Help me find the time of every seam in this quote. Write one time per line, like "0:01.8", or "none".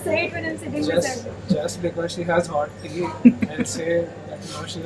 none